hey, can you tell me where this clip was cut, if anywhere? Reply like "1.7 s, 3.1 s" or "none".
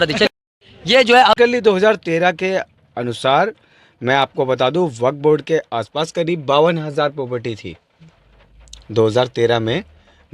1.4 s